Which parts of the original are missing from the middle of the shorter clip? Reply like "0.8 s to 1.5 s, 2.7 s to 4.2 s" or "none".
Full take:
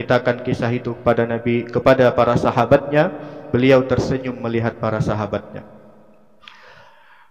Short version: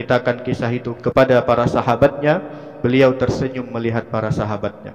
1.0 s to 1.7 s